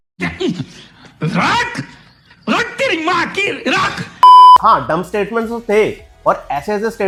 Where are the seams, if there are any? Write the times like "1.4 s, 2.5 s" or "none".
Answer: none

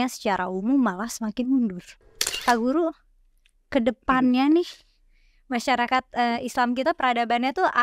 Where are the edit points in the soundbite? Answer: 2.4 s

